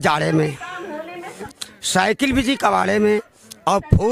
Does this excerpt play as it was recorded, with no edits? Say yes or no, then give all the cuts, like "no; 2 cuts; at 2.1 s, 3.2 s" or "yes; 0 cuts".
no; 1 cut; at 1.5 s